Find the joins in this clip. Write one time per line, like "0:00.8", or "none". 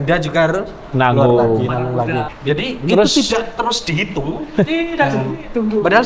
0:02.3